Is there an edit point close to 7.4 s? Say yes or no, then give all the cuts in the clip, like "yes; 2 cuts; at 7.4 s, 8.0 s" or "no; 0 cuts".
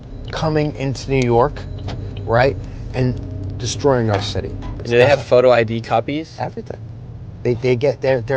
no; 1 cut; at 4.7 s